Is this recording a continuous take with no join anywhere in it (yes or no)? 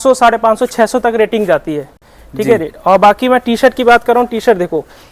yes